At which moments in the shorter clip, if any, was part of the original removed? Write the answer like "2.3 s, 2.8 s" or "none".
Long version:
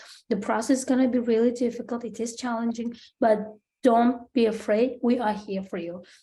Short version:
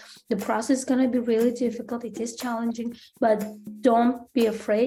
none